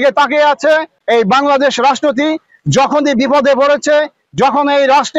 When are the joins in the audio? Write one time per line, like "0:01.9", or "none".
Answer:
0:01.0